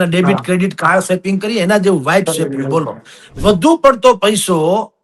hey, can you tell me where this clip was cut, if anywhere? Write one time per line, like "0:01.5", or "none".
0:03.3